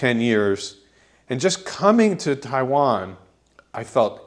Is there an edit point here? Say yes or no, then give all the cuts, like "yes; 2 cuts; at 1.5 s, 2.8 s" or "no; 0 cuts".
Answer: no; 0 cuts